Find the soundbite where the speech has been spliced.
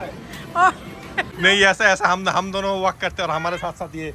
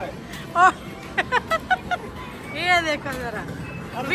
first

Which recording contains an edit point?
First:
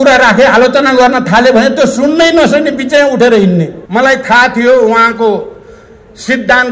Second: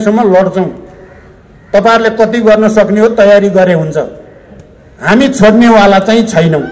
first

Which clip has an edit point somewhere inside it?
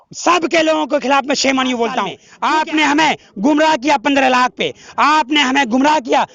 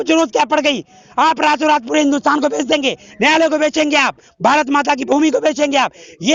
first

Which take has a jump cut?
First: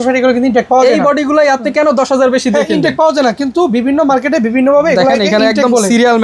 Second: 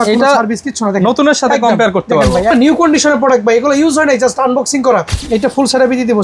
second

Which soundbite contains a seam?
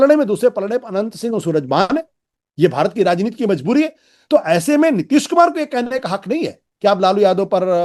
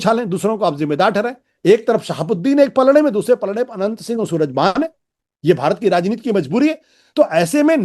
second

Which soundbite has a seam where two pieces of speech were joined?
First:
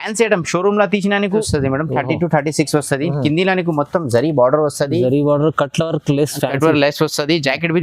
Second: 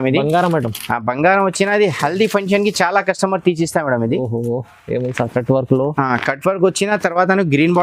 first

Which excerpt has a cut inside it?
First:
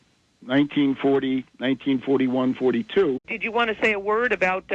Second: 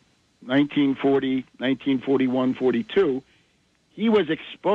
second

